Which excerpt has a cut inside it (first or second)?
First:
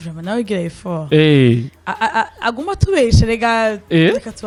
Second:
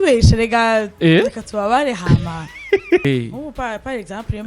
second